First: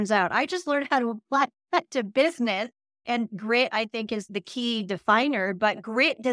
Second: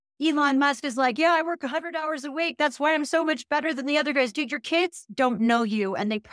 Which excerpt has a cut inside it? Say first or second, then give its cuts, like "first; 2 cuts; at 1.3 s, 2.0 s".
first; 2 cuts; at 3.0 s, 4.3 s